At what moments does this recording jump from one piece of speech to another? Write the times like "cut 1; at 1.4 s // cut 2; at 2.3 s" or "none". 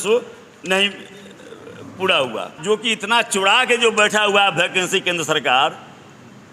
cut 1; at 2.5 s